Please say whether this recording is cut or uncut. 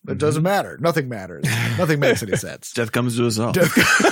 cut